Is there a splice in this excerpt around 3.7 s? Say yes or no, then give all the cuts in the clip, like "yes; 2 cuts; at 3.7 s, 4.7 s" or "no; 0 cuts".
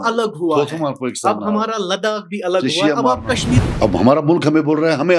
yes; 1 cut; at 3.7 s